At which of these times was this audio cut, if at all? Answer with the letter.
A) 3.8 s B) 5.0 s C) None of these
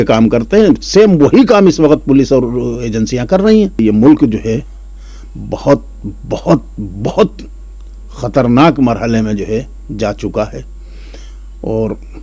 A